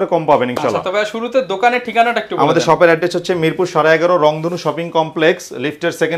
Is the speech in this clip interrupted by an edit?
no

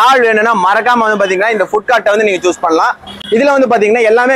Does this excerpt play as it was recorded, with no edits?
yes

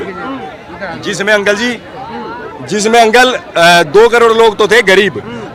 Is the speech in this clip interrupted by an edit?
no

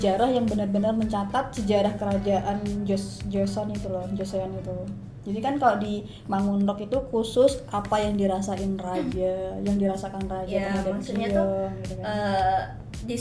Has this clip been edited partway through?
no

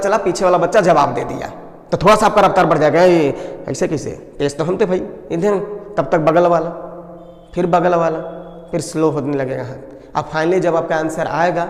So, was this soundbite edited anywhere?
no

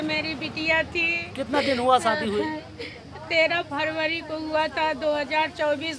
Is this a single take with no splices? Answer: yes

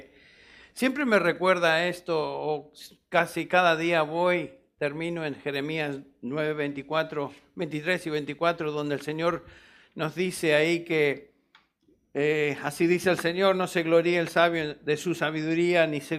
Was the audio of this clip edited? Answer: no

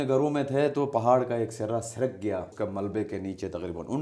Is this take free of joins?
no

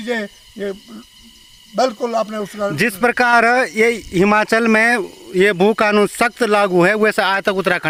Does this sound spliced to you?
no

